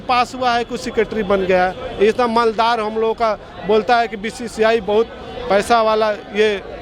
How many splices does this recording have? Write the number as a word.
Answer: zero